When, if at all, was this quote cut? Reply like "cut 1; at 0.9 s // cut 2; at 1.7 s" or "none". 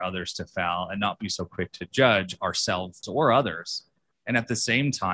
cut 1; at 3.0 s